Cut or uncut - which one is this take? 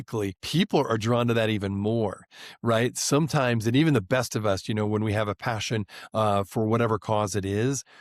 uncut